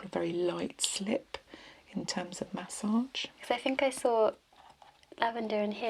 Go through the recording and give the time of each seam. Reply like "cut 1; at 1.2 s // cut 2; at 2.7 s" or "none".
cut 1; at 3.4 s